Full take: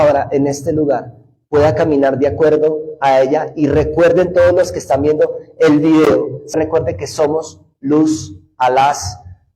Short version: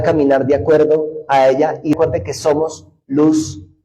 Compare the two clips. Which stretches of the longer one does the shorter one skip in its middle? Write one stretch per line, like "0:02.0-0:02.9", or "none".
0:03.7-0:06.7